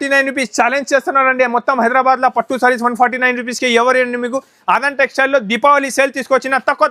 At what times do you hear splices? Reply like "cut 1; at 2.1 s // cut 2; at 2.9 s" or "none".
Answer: none